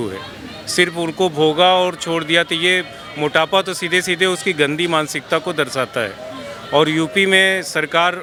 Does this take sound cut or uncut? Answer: uncut